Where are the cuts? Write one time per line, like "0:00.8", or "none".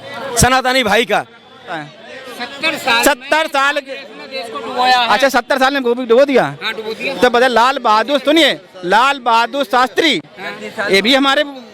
0:01.8